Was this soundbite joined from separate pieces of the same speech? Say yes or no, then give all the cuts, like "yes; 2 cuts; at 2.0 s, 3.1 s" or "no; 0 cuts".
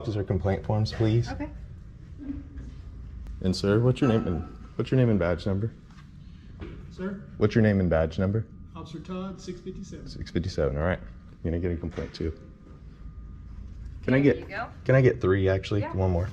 yes; 1 cut; at 3.2 s